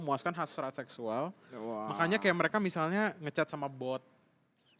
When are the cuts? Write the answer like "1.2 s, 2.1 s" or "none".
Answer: none